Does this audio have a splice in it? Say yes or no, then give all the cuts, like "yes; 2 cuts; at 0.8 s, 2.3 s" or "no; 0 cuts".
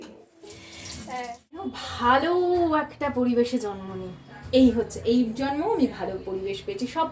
yes; 1 cut; at 1.9 s